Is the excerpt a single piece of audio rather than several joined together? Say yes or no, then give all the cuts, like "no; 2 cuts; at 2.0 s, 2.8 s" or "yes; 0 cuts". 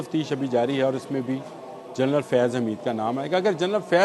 yes; 0 cuts